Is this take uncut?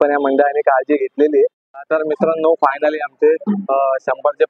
no; 1 cut; at 1.7 s

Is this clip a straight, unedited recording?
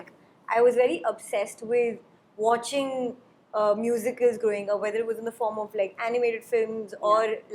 yes; 0 cuts

